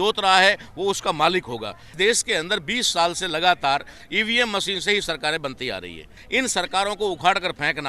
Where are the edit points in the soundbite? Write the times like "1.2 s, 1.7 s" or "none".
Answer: 1.8 s, 6.2 s